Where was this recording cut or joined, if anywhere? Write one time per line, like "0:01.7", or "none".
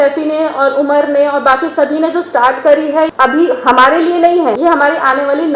0:03.1
0:04.6